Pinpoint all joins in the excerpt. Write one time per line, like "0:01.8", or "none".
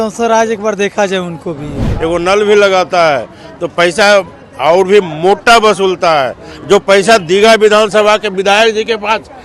0:01.9